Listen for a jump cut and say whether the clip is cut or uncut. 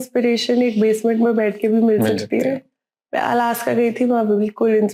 uncut